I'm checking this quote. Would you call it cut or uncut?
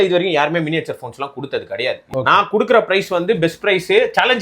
cut